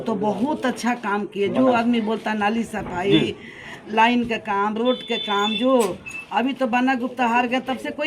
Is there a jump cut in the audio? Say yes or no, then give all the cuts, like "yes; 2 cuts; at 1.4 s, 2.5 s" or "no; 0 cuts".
no; 0 cuts